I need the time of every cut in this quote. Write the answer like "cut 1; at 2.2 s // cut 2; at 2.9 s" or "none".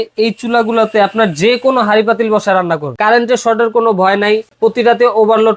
cut 1; at 2.8 s // cut 2; at 4.5 s